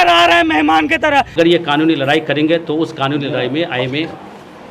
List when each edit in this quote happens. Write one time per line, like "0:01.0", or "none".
0:01.3